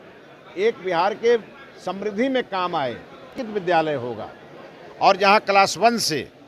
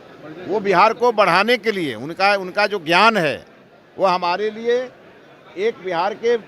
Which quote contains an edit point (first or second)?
first